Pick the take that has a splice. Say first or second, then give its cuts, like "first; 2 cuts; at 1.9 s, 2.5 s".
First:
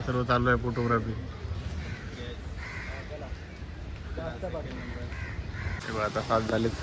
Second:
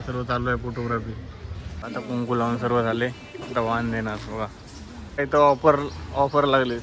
second; 2 cuts; at 1.7 s, 5.1 s